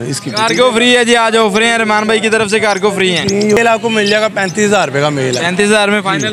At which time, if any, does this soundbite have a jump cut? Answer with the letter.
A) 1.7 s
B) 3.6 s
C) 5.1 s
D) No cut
B